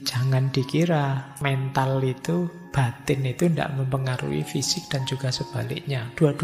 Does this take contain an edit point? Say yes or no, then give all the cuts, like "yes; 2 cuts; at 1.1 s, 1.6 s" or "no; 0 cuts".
yes; 1 cut; at 1.3 s